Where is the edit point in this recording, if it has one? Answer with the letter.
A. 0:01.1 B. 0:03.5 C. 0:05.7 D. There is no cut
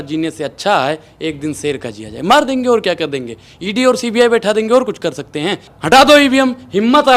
C